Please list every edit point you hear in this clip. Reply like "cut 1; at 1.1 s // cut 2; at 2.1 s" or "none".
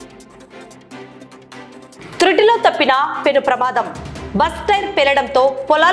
cut 1; at 1.9 s